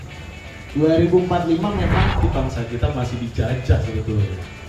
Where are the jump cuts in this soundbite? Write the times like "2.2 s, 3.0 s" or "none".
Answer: 2.2 s